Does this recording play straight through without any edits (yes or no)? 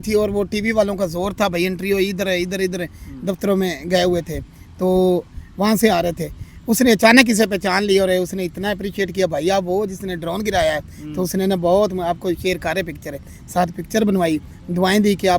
yes